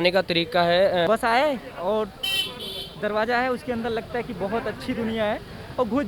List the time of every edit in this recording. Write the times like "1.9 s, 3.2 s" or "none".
1.1 s